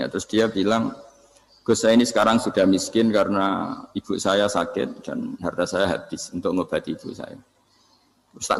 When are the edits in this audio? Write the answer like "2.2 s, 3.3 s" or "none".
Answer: none